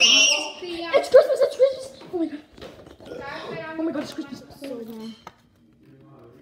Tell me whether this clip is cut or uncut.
cut